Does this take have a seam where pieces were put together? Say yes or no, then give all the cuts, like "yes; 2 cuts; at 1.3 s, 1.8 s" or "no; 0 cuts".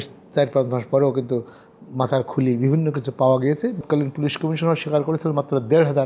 yes; 1 cut; at 3.8 s